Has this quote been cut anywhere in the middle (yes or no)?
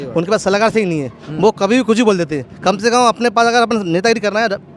no